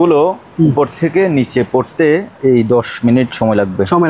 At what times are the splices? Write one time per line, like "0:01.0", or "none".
none